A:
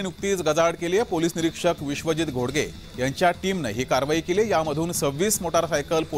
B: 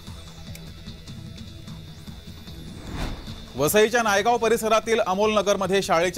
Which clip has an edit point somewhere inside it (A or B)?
B